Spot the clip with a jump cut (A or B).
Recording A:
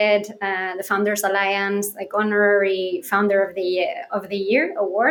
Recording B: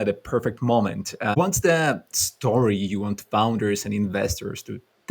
B